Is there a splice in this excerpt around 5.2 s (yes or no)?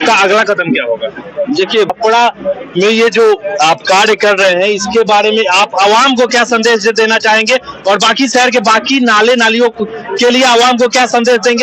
no